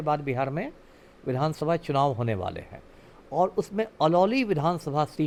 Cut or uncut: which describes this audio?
uncut